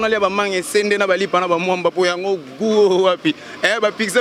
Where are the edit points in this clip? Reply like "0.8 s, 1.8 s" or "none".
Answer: none